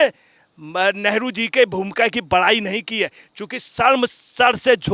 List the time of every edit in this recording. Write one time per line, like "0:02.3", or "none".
none